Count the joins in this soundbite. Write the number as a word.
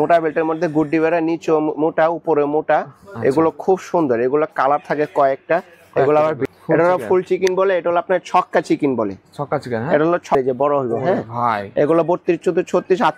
two